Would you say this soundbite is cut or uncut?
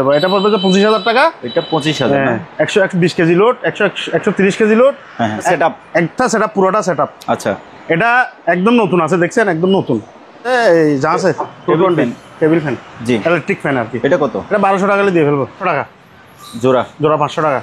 cut